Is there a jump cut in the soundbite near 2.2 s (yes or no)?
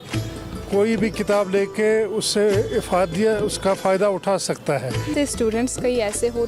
no